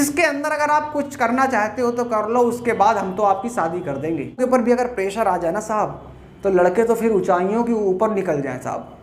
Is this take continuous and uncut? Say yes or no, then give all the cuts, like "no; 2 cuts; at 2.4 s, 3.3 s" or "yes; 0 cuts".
no; 1 cut; at 4.4 s